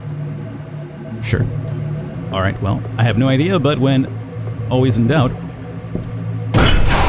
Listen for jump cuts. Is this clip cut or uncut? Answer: cut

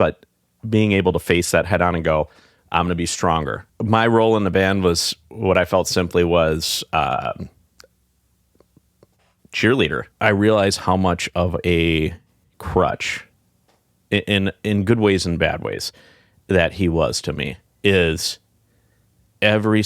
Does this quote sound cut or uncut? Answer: cut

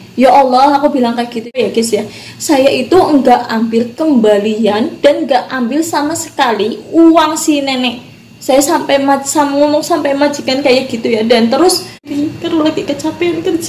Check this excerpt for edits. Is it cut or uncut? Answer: cut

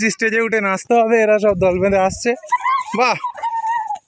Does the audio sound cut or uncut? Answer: uncut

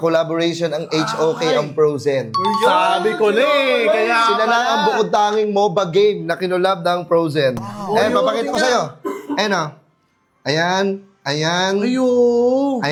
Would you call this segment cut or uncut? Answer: uncut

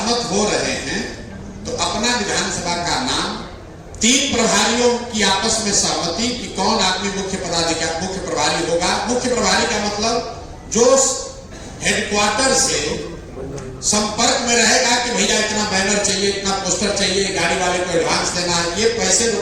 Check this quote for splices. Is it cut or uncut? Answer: uncut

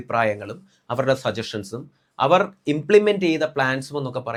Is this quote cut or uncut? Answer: uncut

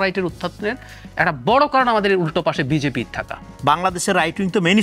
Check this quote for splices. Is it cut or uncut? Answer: cut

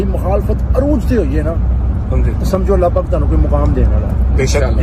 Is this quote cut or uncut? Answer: uncut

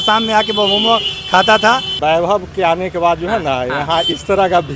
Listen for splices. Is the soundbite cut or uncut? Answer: cut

